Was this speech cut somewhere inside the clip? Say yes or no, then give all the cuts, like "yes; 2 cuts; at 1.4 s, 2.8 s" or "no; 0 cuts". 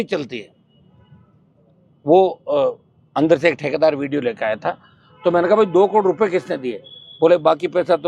no; 0 cuts